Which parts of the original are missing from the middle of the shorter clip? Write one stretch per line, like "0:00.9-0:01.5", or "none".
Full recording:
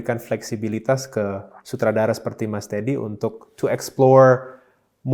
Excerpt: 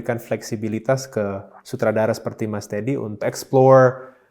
0:03.2-0:03.7